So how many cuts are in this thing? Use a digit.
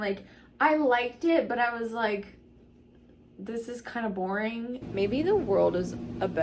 1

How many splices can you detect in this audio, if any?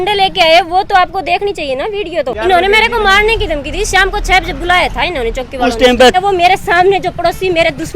2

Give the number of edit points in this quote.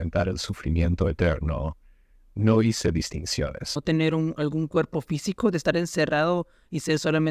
1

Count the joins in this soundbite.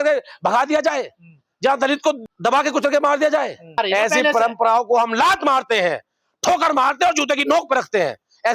1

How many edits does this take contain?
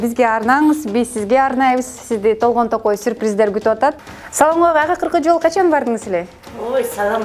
1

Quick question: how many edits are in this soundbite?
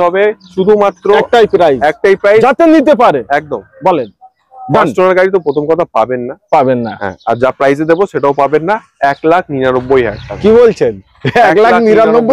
0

